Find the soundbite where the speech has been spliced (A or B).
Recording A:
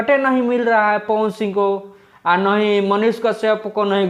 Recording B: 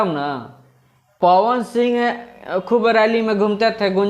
B